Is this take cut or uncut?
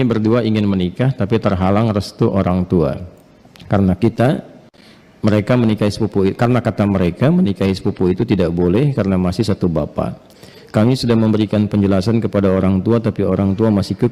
uncut